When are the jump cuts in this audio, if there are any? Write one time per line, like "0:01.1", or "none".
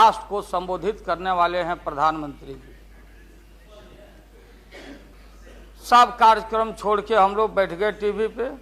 0:05.1